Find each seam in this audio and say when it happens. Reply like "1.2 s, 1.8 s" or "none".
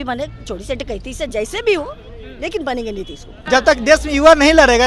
3.3 s